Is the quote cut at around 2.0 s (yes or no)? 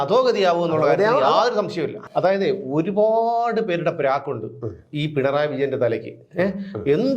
yes